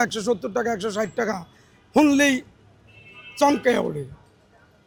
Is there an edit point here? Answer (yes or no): no